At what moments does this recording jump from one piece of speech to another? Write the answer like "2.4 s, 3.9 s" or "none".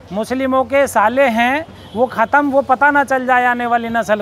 none